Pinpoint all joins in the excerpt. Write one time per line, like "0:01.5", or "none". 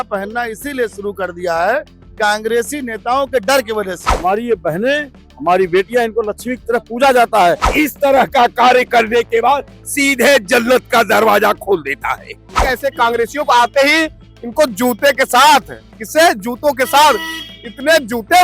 0:04.0
0:07.7
0:12.6

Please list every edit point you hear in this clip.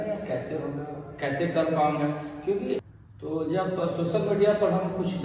0:02.8

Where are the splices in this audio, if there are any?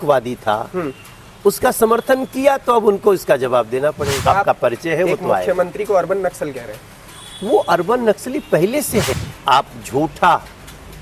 0:04.2
0:09.2

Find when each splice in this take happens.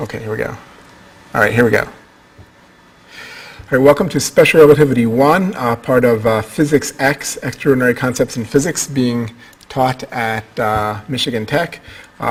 none

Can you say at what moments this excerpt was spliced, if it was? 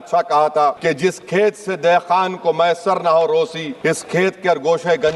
0:00.8
0:03.6

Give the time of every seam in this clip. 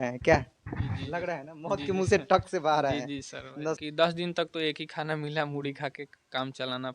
0:03.8

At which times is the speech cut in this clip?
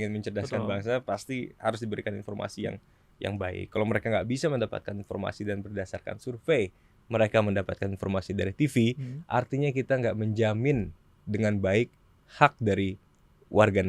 none

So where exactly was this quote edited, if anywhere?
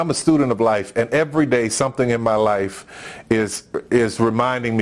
none

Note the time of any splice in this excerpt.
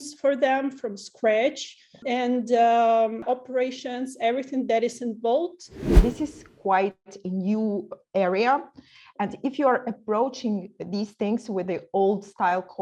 0:02.0
0:03.2
0:05.9

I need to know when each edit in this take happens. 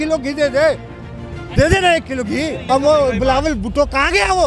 0:02.6

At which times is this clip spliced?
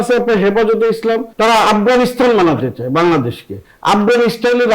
none

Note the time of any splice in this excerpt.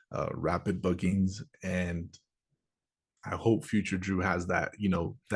none

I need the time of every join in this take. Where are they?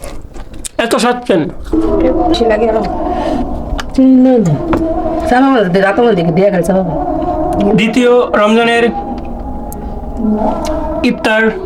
0:02.3

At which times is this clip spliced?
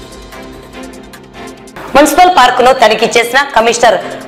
0:01.4

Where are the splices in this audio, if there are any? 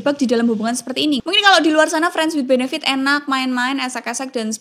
0:01.2

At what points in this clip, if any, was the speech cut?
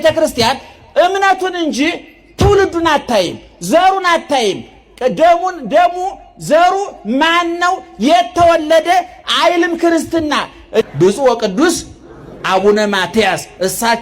0:10.8

